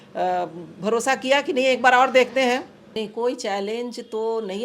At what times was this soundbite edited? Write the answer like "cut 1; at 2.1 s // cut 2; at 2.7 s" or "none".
cut 1; at 2.8 s

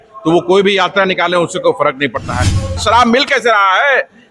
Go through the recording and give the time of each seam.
cut 1; at 2.8 s

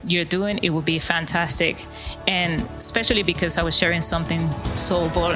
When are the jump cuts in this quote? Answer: none

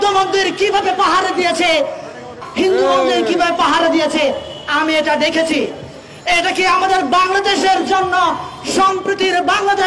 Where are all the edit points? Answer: cut 1; at 2.4 s

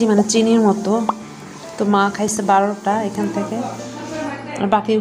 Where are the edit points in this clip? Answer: none

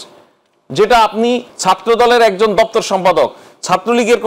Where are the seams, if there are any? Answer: cut 1; at 1.5 s

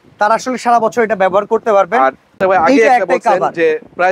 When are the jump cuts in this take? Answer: cut 1; at 2.3 s

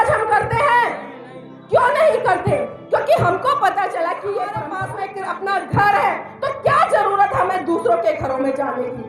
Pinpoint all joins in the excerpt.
cut 1; at 4.7 s

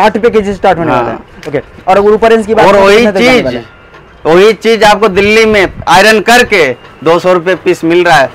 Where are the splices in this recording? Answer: none

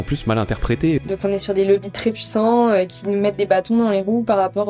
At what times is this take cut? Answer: cut 1; at 1.0 s

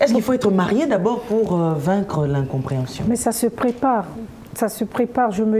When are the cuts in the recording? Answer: none

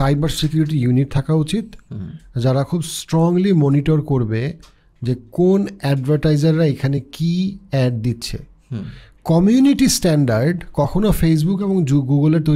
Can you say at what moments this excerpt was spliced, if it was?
none

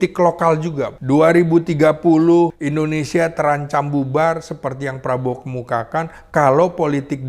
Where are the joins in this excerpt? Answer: cut 1; at 0.9 s // cut 2; at 2.6 s

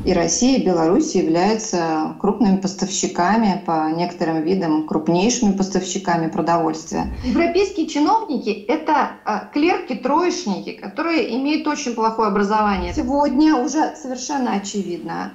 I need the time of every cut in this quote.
cut 1; at 7.3 s // cut 2; at 12.9 s

